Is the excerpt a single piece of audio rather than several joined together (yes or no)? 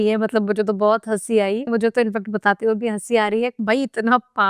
no